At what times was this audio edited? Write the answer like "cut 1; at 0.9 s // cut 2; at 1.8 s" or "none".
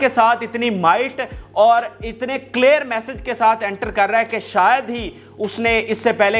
none